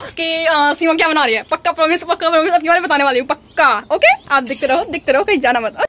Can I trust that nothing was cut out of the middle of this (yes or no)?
yes